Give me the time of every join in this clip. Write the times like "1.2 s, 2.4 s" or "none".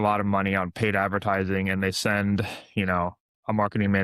none